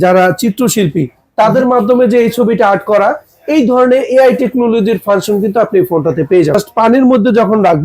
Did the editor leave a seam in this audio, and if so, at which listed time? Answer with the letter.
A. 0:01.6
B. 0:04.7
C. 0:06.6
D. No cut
C